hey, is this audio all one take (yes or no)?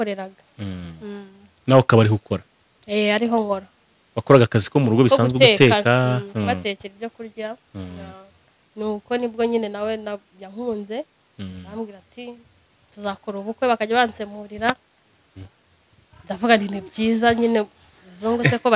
yes